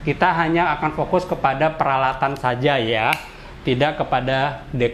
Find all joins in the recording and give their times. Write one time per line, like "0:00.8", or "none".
none